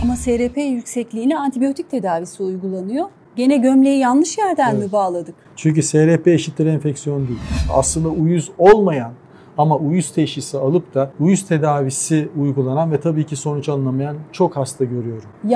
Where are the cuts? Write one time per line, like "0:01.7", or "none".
0:03.2
0:07.7
0:11.1